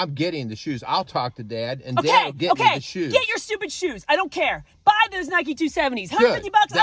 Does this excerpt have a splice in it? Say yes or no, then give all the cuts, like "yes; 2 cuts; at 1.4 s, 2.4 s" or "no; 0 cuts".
yes; 1 cut; at 1.8 s